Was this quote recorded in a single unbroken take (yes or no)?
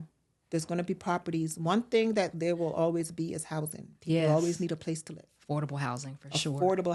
yes